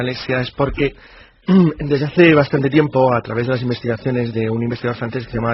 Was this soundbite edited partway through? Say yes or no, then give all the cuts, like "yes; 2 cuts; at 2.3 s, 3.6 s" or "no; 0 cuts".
no; 0 cuts